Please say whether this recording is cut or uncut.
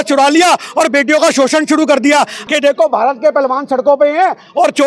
cut